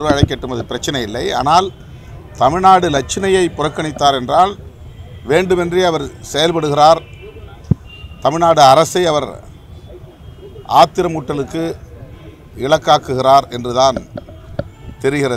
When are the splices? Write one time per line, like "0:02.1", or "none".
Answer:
none